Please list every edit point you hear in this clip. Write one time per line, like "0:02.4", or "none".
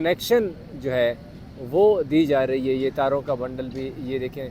none

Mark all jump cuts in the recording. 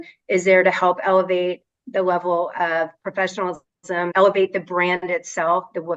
0:04.1

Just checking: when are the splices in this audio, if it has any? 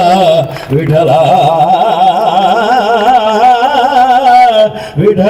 none

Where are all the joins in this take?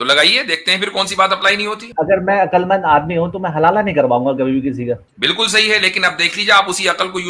0:01.9
0:05.1

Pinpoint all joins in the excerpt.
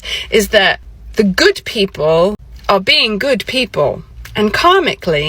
0:00.9
0:02.5
0:04.1

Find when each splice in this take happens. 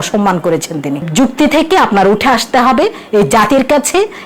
0:01.1

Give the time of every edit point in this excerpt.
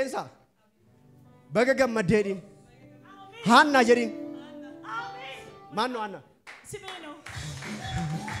none

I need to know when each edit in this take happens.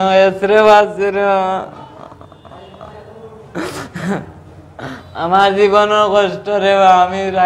none

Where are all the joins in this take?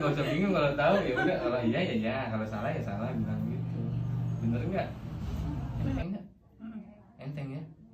0:06.0

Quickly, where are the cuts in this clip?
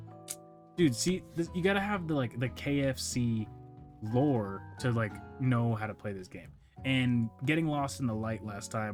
none

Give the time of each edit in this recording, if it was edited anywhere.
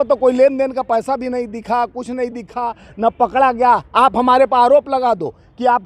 none

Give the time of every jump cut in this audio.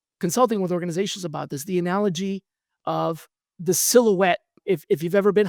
0:03.5
0:04.5

